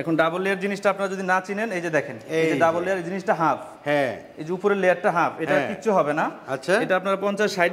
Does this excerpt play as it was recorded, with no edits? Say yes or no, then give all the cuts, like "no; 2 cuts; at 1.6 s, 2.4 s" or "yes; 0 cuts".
yes; 0 cuts